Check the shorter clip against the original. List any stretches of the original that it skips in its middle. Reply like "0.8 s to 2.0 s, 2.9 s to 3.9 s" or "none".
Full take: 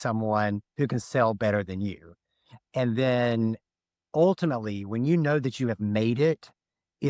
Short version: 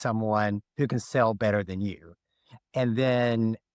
none